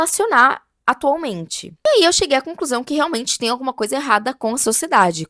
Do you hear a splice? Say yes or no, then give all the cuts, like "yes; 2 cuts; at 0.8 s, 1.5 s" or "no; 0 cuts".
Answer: yes; 1 cut; at 1.6 s